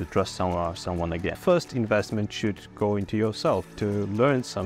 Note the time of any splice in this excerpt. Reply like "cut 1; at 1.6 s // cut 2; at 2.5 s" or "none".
cut 1; at 1.4 s // cut 2; at 3.7 s